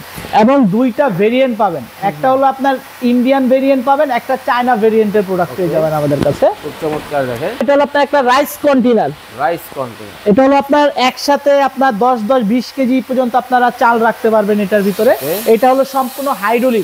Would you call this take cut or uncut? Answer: cut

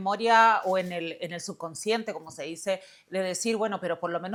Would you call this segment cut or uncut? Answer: uncut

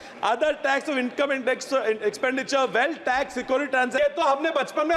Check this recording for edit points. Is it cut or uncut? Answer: cut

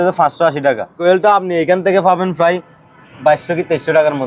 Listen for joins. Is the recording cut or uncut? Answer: cut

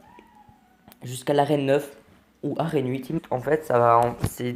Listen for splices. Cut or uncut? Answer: uncut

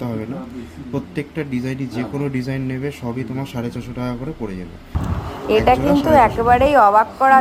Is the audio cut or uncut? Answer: uncut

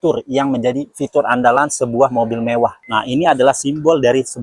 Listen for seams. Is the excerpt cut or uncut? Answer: cut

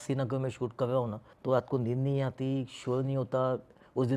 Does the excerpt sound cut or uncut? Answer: cut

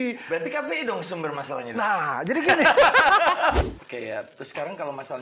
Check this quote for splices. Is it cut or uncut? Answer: cut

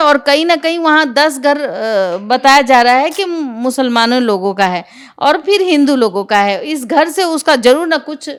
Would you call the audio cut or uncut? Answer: uncut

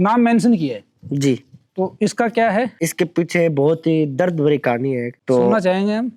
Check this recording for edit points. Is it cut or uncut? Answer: uncut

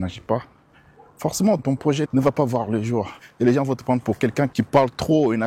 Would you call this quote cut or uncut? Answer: cut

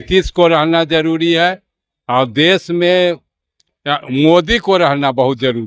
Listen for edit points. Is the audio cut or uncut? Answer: uncut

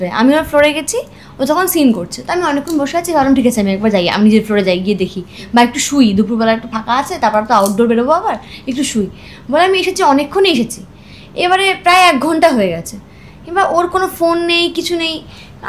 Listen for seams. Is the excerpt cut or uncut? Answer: uncut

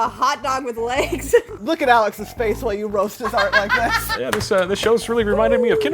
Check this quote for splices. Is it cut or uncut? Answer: cut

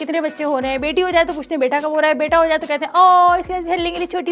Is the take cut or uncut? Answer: uncut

